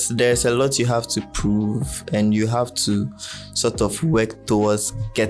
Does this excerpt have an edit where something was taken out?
no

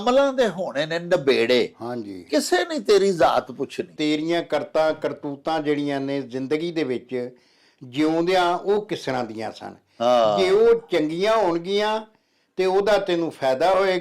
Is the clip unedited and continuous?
no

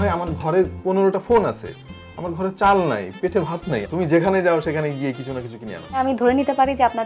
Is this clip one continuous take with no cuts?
no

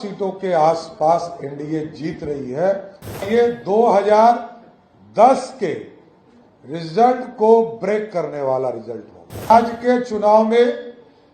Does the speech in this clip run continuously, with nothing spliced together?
no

